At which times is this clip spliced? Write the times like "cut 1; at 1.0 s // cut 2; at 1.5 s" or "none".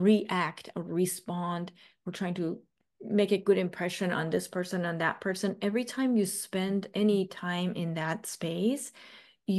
cut 1; at 2.7 s